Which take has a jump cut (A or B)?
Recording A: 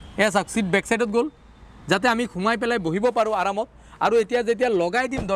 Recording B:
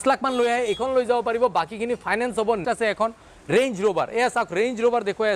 B